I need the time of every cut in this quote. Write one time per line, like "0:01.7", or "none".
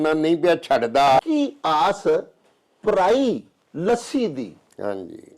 0:01.2